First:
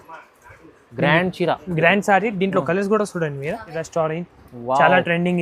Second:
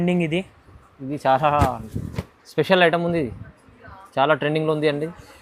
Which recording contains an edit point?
first; 1 cut; at 3.7 s

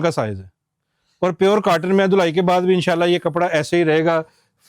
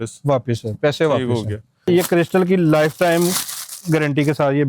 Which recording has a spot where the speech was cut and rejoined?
second; 1 cut; at 1.9 s

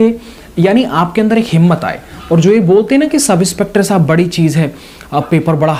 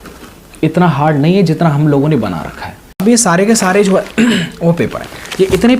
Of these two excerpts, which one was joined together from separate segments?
second; 1 cut; at 3.0 s

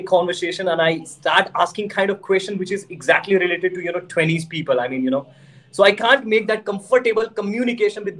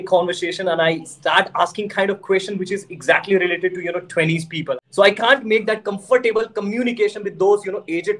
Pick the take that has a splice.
second; 1 cut; at 4.7 s

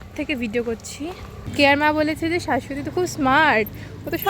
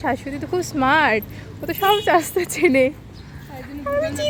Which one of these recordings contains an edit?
first; 1 cut; at 1.5 s

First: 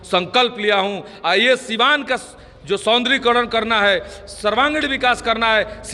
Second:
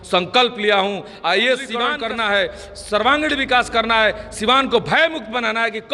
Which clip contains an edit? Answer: second; 1 cut; at 1.9 s

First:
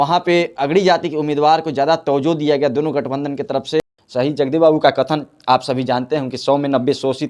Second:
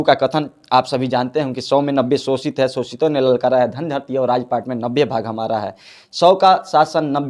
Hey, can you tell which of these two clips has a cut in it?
first; 1 cut; at 3.8 s

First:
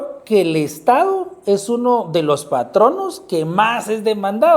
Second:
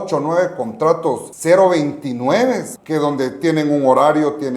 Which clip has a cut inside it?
second; 2 cuts; at 1.3 s, 2.7 s

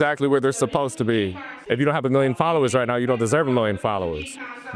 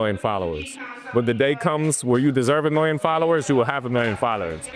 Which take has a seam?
first; 1 cut; at 1.5 s

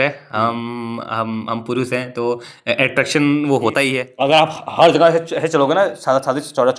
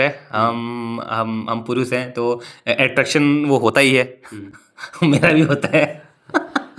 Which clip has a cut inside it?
first; 1 cut; at 4.0 s

